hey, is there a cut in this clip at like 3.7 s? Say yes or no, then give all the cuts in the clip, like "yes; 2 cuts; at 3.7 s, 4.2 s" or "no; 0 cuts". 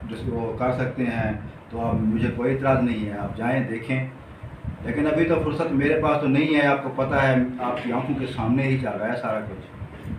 no; 0 cuts